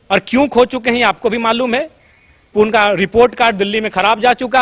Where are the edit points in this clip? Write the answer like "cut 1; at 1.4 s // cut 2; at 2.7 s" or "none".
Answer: none